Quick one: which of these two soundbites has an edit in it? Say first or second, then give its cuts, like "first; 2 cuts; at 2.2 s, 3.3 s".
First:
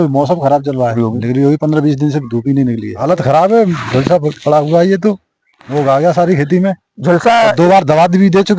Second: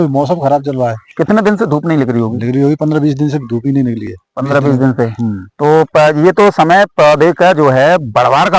first; 2 cuts; at 0.9 s, 2.9 s